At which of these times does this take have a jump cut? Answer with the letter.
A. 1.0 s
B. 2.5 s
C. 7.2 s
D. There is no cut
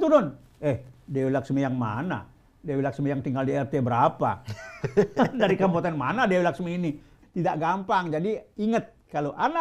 C